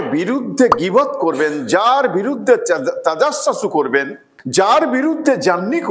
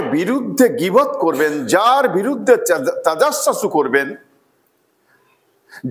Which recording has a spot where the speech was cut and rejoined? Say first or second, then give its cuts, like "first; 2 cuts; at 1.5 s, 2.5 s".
first; 1 cut; at 4.5 s